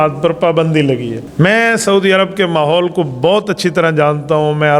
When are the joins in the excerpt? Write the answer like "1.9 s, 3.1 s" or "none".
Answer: 1.2 s